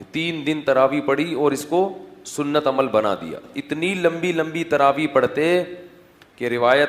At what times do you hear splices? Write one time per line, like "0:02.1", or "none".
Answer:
0:03.5